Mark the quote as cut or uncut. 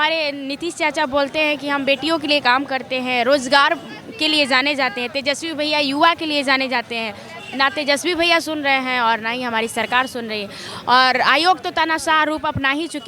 uncut